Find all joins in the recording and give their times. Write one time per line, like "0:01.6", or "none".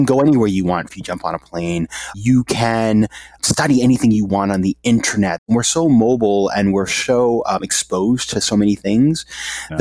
0:00.9
0:02.2
0:03.4
0:05.4